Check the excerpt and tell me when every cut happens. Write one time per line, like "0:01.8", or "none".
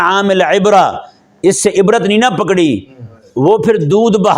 none